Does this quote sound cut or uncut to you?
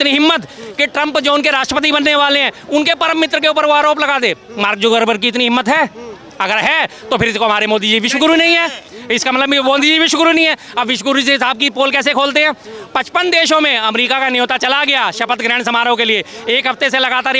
uncut